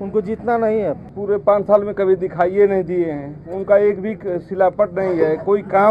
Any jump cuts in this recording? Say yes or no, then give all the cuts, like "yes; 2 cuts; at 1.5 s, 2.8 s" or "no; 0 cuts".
yes; 1 cut; at 1.1 s